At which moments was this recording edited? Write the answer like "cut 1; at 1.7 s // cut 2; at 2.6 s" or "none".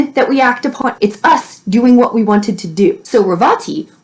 cut 1; at 0.8 s // cut 2; at 3.0 s

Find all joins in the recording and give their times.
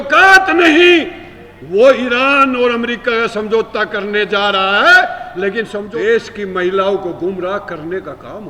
cut 1; at 5.8 s

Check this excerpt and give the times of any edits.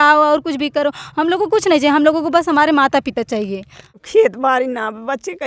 cut 1; at 4.0 s

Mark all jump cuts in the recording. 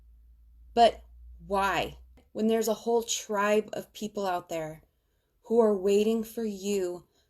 cut 1; at 2.2 s

